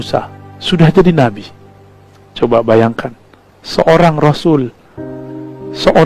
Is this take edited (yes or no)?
no